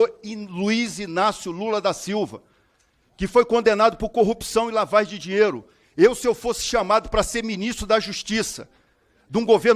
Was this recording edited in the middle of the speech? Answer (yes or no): no